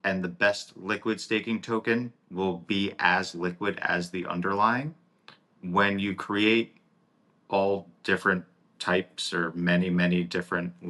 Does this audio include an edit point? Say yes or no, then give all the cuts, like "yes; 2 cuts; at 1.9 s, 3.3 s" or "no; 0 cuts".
no; 0 cuts